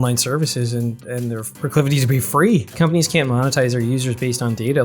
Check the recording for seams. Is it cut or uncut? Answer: cut